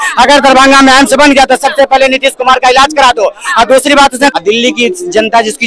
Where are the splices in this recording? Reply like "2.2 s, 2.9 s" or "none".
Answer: 4.3 s